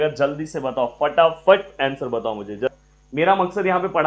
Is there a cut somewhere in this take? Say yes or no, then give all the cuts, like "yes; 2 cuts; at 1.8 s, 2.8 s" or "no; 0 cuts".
yes; 1 cut; at 2.7 s